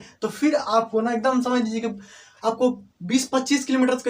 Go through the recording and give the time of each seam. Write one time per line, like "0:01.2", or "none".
none

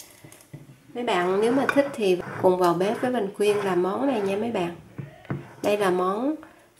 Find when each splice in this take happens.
0:02.2

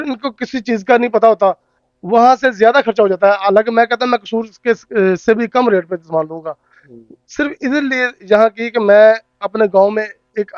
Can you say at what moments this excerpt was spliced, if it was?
none

